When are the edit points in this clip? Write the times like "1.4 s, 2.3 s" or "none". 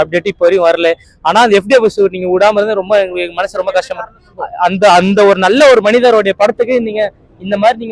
1.1 s, 4.2 s